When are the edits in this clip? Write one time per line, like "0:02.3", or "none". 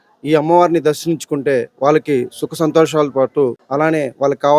0:03.6

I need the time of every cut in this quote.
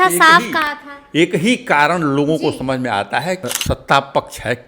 0:03.5

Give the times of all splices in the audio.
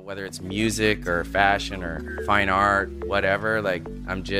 0:02.1
0:03.0

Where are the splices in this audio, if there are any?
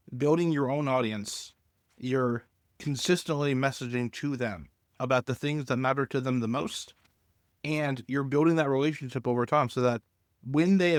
none

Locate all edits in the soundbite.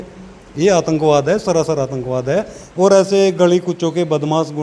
0:02.6

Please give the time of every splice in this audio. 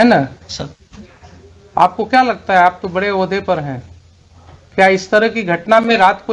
none

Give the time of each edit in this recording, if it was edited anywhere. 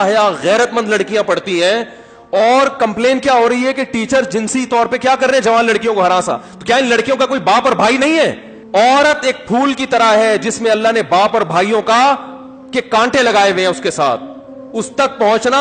0:08.5

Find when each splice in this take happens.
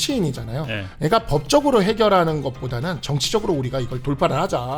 none

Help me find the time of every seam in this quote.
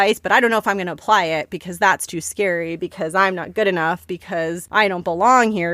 0:04.3

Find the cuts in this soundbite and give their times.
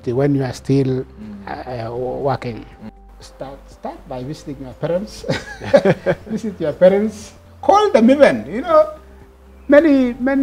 0:02.8

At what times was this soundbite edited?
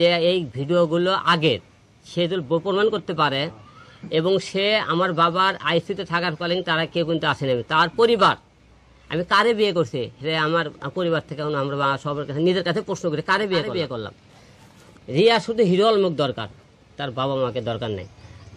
none

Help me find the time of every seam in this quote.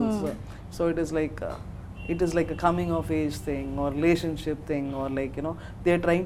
none

